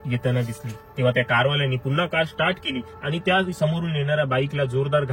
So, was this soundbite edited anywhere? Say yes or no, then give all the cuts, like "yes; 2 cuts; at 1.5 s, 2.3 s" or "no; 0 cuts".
no; 0 cuts